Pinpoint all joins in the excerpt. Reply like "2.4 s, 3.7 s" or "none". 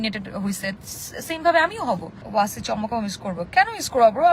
2.2 s